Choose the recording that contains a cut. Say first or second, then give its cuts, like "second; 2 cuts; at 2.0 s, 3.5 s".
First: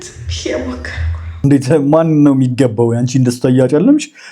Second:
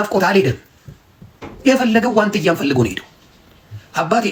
first; 1 cut; at 1.2 s